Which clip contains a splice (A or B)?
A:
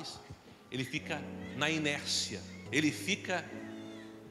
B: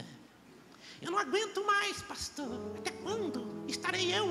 A